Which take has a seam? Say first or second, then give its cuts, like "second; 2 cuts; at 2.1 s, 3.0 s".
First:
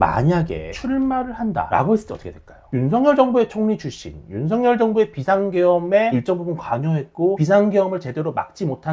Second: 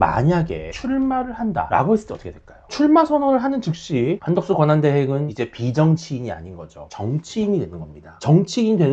first; 2 cuts; at 2.7 s, 6.1 s